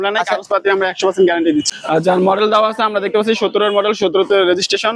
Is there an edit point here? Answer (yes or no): yes